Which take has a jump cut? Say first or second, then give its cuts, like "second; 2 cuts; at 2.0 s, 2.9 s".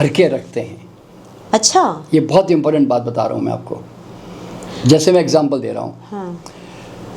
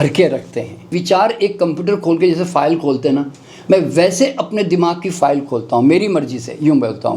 second; 1 cut; at 1.0 s